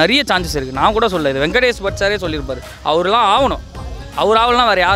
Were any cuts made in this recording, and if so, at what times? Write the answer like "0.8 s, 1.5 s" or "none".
2.7 s